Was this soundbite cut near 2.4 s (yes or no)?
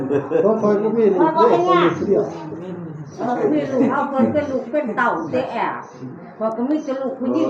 no